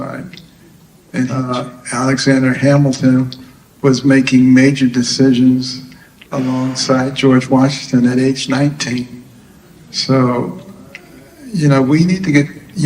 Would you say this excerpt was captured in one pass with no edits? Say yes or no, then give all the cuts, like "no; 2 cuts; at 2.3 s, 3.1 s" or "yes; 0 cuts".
no; 1 cut; at 1.5 s